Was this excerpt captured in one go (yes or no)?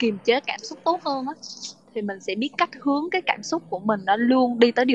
yes